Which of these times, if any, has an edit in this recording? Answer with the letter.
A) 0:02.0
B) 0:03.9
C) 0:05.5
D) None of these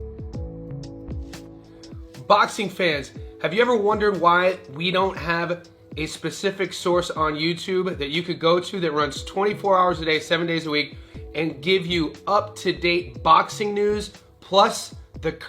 A